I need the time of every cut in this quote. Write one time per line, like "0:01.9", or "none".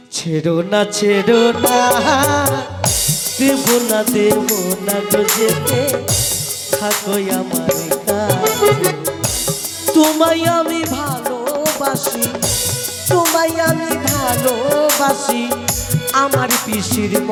none